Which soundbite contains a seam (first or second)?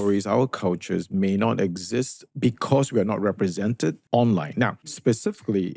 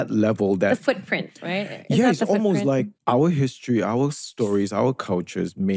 first